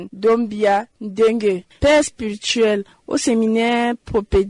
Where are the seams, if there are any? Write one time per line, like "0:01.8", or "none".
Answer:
none